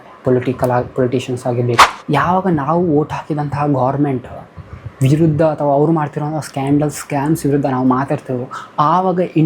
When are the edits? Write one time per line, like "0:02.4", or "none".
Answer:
0:01.9